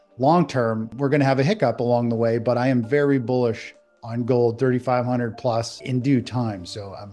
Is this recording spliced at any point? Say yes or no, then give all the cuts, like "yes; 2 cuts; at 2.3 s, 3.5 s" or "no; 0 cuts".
yes; 2 cuts; at 0.9 s, 5.8 s